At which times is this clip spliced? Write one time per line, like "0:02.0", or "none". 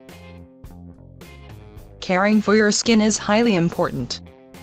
0:02.8